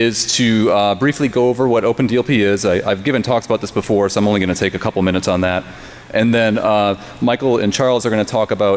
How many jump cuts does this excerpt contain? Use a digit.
1